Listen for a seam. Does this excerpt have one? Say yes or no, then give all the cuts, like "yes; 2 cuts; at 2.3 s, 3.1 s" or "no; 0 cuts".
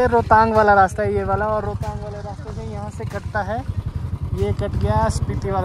no; 0 cuts